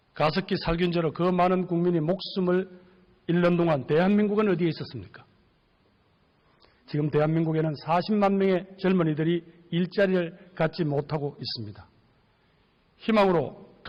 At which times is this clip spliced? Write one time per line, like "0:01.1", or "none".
none